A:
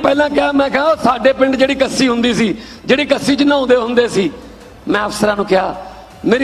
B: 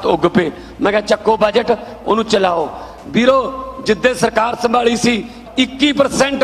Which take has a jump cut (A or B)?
B